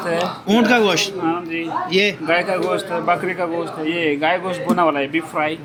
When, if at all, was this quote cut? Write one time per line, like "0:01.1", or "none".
none